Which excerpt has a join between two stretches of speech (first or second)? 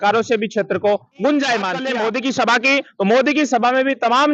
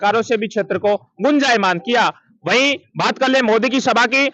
first